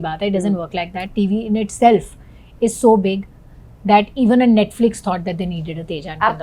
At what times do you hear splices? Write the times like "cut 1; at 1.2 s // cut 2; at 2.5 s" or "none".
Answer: none